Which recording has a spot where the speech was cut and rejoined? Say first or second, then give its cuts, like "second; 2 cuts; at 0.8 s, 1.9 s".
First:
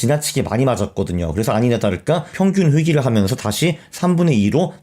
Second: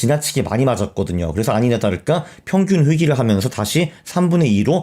first; 1 cut; at 2.3 s